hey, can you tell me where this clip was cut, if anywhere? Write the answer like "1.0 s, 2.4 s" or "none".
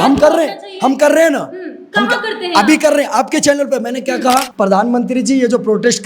4.5 s